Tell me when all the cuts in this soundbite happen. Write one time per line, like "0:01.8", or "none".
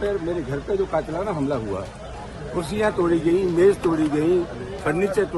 none